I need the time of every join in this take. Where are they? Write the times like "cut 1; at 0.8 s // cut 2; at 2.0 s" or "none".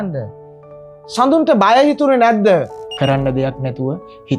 cut 1; at 2.8 s